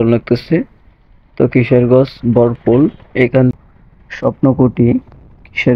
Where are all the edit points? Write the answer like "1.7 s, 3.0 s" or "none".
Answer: 3.5 s